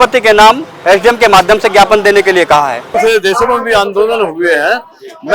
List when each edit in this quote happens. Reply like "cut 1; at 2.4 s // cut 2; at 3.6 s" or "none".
cut 1; at 3.0 s